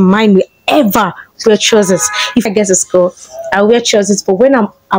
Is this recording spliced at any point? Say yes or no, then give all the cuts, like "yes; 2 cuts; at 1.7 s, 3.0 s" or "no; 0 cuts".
yes; 1 cut; at 2.5 s